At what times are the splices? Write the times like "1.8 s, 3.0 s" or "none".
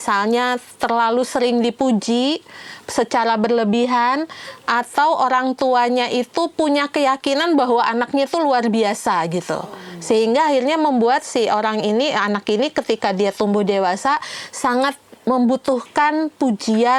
none